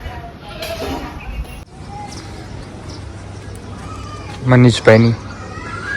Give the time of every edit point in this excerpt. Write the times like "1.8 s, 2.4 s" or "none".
1.6 s